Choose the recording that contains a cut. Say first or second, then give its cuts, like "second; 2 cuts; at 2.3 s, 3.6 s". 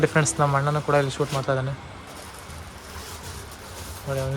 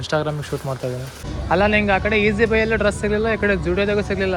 second; 1 cut; at 1.2 s